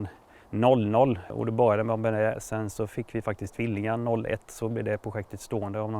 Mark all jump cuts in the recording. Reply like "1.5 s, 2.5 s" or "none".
1.3 s